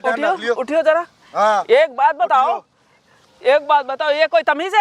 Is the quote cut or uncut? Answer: uncut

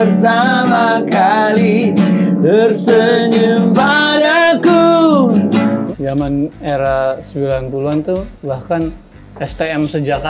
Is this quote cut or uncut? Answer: cut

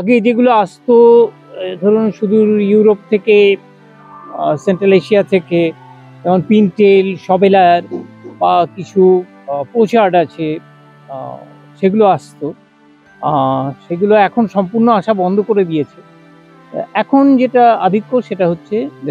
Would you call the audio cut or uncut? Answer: uncut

